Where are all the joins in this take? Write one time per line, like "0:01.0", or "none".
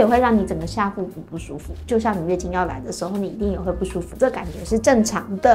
none